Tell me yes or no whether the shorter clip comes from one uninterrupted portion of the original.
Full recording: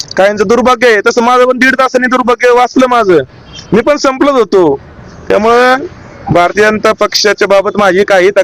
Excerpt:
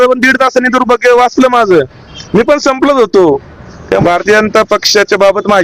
no